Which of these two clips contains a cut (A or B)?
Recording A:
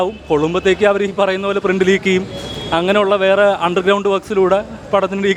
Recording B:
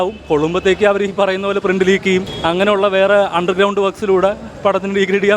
B